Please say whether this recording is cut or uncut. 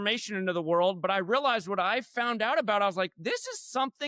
uncut